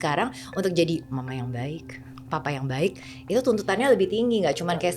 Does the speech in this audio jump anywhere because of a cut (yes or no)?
no